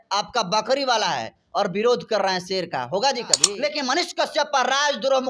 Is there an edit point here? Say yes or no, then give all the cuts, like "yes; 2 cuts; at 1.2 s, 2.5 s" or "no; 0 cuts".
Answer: yes; 1 cut; at 3.4 s